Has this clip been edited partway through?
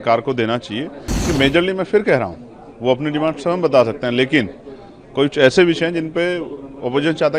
yes; 1 cut; at 1.1 s

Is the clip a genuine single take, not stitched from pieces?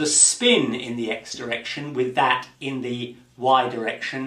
no; 1 cut; at 2.5 s

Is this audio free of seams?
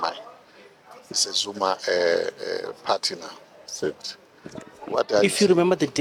yes; 0 cuts

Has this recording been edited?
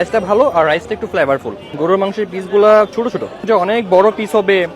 yes; 2 cuts; at 1.6 s, 3.5 s

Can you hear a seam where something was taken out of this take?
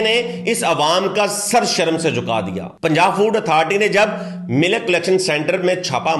yes; 1 cut; at 2.6 s

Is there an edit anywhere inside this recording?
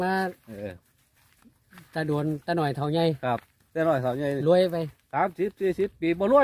no; 0 cuts

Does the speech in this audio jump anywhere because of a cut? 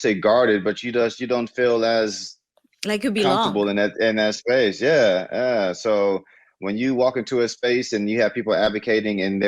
no; 0 cuts

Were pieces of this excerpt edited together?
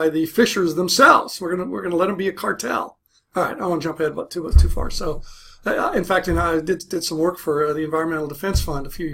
yes; 1 cut; at 5.7 s

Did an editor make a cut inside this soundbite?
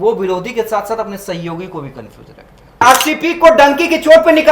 yes; 1 cut; at 2.8 s

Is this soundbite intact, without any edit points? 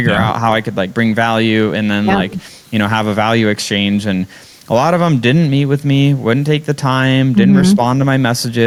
yes; 0 cuts

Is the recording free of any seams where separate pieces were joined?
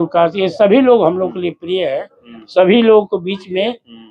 yes; 0 cuts

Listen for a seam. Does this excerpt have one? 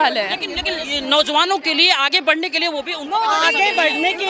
no; 0 cuts

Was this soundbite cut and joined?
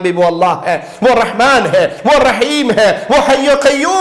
no; 0 cuts

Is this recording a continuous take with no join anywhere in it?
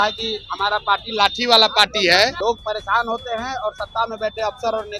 no; 1 cut; at 2.4 s

